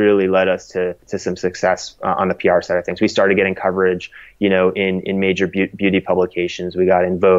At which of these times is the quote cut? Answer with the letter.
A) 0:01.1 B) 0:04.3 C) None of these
A